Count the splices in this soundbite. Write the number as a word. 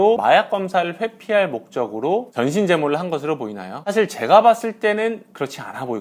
zero